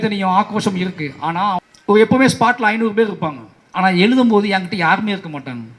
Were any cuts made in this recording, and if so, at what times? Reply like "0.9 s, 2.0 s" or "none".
1.7 s